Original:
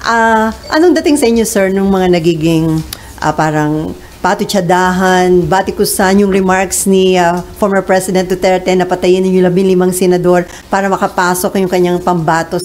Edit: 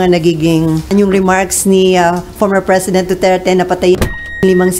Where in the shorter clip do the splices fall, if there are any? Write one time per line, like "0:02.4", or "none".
0:00.9